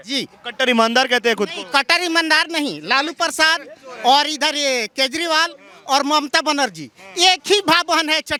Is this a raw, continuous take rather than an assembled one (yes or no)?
yes